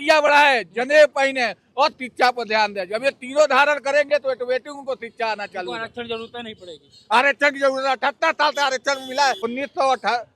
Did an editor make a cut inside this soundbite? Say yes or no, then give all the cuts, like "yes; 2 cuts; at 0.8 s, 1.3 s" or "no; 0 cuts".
yes; 1 cut; at 9.4 s